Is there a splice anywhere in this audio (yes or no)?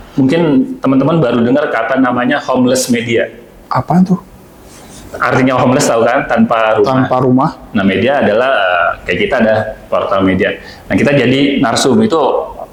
no